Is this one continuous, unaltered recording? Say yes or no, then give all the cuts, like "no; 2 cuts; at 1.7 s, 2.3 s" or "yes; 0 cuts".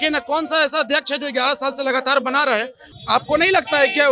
no; 1 cut; at 2.8 s